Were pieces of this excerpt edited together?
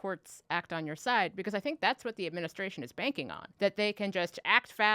yes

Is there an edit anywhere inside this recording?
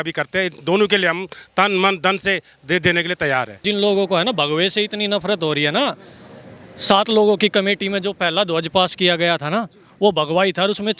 yes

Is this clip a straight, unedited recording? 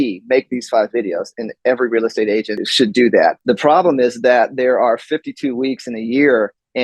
no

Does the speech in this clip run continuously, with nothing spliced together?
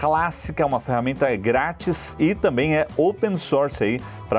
yes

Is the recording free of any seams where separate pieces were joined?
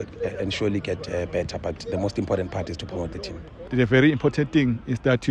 no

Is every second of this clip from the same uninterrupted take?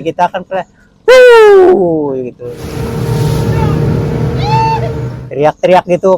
no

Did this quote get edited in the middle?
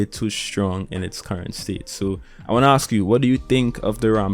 no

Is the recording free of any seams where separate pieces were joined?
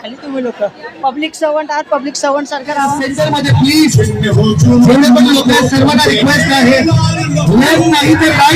no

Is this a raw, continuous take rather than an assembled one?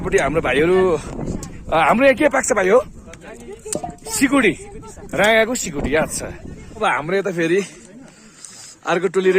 no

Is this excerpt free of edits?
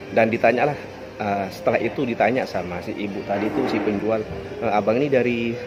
yes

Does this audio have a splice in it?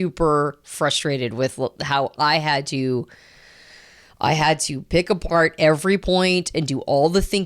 no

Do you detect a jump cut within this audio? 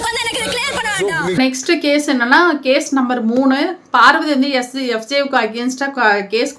no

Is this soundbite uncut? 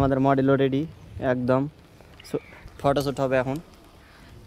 yes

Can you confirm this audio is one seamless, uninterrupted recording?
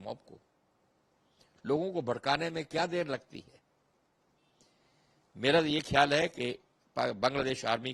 yes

